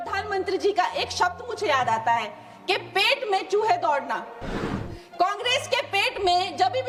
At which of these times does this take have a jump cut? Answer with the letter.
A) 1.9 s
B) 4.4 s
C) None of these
C